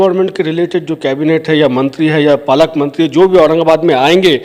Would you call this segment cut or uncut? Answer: uncut